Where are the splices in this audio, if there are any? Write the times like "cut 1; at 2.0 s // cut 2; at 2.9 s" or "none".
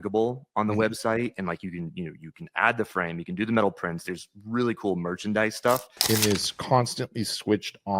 cut 1; at 6.0 s